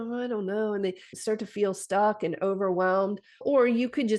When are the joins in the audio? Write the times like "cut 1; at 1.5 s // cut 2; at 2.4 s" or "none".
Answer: cut 1; at 1.0 s // cut 2; at 3.4 s